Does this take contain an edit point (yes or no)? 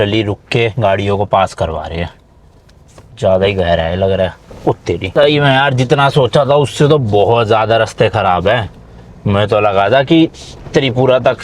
yes